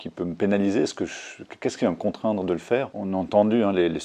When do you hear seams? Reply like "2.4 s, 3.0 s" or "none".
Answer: 3.0 s